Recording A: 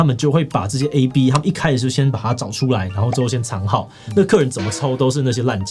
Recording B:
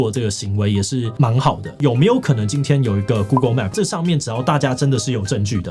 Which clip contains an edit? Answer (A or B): B